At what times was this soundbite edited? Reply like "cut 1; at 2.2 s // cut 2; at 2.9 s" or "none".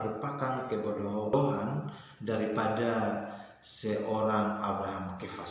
cut 1; at 1.3 s